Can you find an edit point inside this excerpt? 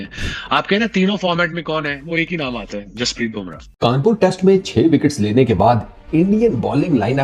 yes; 1 cut; at 3.7 s

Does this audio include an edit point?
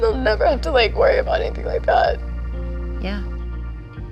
no; 0 cuts

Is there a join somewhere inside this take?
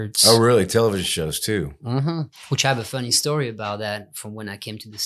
yes; 1 cut; at 2.4 s

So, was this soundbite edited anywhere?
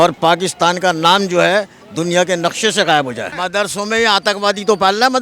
yes; 1 cut; at 3.3 s

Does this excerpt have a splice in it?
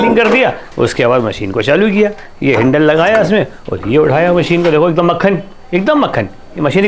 no; 0 cuts

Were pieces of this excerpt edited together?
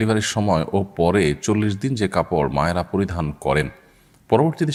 no; 0 cuts

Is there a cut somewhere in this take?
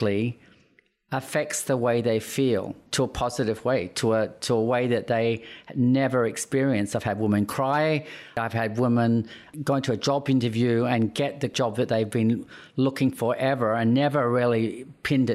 yes; 4 cuts; at 2.8 s, 8.4 s, 9.4 s, 11.5 s

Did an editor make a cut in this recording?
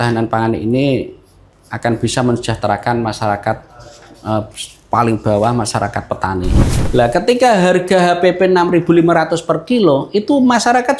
yes; 1 cut; at 6.7 s

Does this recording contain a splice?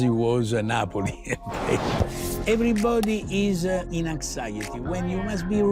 yes; 2 cuts; at 2.2 s, 3.9 s

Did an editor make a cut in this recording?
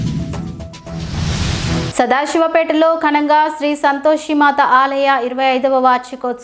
no; 0 cuts

